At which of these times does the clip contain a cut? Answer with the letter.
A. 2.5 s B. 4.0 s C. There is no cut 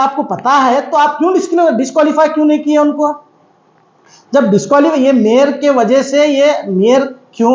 C